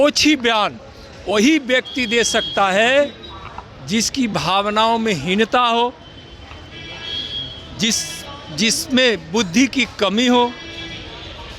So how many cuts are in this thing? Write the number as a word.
zero